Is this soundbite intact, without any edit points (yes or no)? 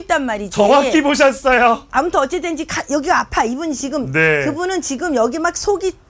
no